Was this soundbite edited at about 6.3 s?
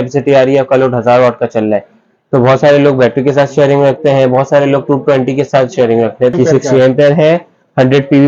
yes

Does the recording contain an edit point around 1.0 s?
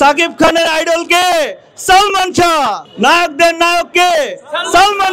no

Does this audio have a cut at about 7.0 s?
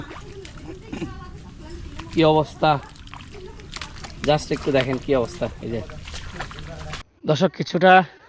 yes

